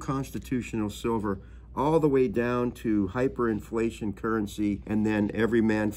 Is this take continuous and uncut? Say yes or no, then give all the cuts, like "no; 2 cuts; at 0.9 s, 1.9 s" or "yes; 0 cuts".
no; 1 cut; at 4.8 s